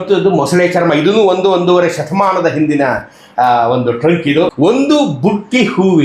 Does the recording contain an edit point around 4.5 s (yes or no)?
yes